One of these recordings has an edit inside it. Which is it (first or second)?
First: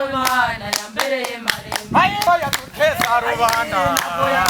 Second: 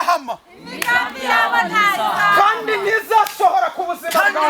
first